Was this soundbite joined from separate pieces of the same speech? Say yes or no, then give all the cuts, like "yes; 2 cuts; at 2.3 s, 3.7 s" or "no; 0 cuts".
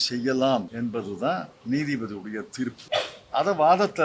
yes; 2 cuts; at 1.1 s, 2.8 s